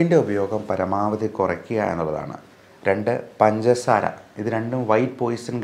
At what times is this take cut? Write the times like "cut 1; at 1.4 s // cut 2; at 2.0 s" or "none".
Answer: none